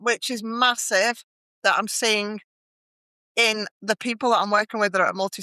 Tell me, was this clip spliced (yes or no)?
no